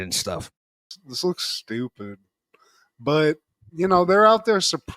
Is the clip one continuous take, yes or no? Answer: yes